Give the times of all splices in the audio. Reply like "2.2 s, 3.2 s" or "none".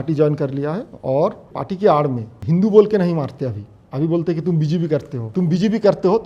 1.5 s, 2.3 s, 5.3 s